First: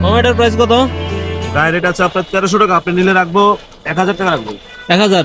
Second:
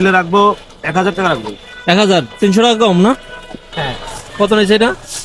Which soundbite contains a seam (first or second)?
second